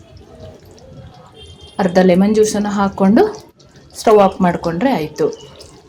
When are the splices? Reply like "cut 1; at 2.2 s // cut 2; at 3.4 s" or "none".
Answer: none